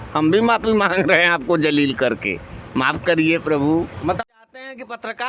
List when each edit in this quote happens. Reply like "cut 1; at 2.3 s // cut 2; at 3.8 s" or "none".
cut 1; at 4.1 s